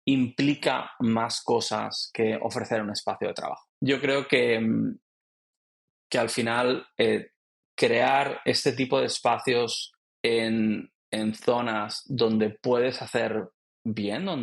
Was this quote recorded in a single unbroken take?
no; 1 cut; at 3.6 s

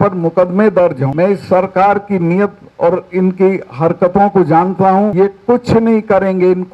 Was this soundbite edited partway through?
yes; 2 cuts; at 1.0 s, 5.1 s

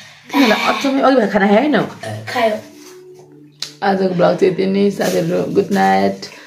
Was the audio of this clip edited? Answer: no; 0 cuts

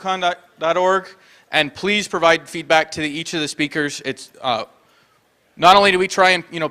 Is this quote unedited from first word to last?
no; 1 cut; at 2.7 s

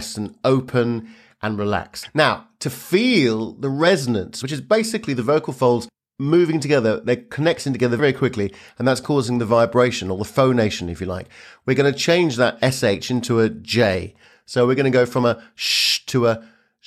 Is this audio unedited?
no; 2 cuts; at 2.0 s, 4.3 s

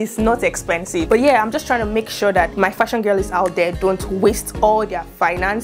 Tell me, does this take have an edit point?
yes; 1 cut; at 1.0 s

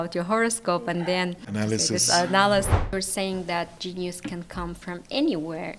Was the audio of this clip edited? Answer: yes; 2 cuts; at 1.5 s, 2.9 s

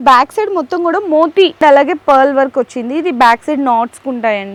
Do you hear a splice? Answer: no; 0 cuts

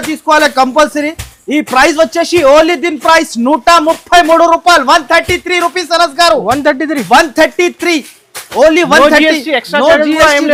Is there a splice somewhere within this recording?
no; 0 cuts

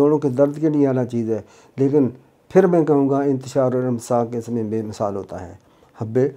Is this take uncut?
yes; 0 cuts

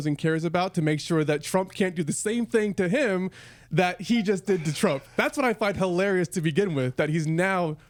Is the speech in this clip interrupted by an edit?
no; 0 cuts

